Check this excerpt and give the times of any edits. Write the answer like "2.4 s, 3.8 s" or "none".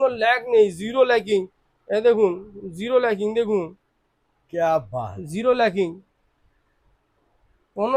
none